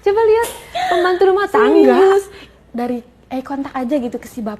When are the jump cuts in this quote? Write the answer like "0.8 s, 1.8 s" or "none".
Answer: 2.6 s